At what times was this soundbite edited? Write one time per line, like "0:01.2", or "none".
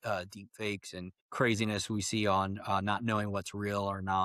0:01.2

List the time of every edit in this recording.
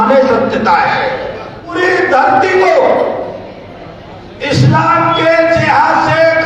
0:01.8

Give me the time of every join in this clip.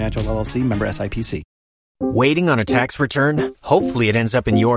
0:02.0

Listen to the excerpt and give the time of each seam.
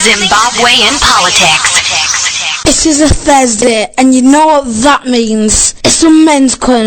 0:02.6

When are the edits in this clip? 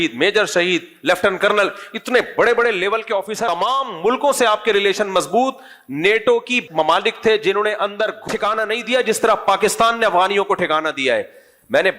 0:03.4
0:08.2

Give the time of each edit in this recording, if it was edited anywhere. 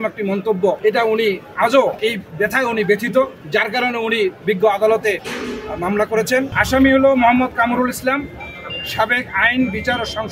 0:00.8
0:02.0
0:03.4
0:05.3
0:06.6

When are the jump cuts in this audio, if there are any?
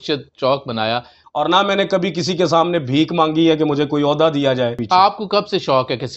0:01.2
0:04.8

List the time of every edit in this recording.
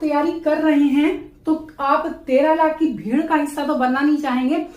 none

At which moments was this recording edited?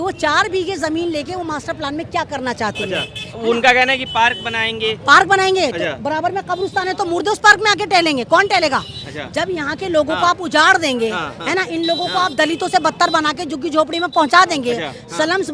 none

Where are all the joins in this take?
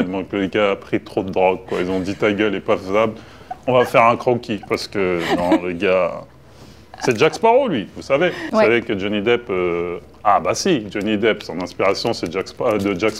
none

